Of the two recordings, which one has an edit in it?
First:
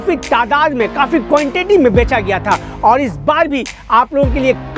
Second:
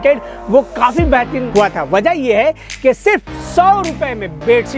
second; 1 cut; at 1.4 s

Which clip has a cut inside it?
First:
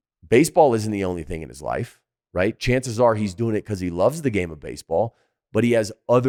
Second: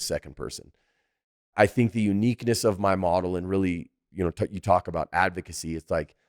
second; 1 cut; at 1.5 s

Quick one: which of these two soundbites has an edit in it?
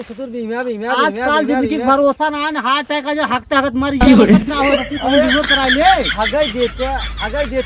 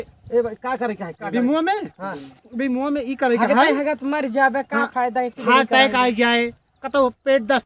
first; 2 cuts; at 4.0 s, 4.9 s

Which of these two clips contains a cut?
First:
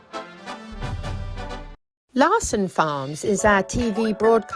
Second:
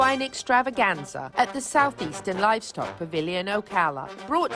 first; 1 cut; at 1.7 s

